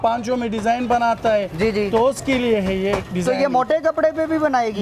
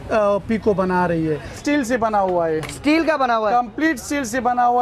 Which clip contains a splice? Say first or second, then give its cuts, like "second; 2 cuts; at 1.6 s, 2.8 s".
second; 1 cut; at 1.6 s